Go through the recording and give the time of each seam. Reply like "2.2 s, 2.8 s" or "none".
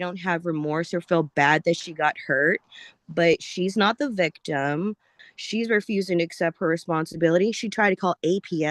5.2 s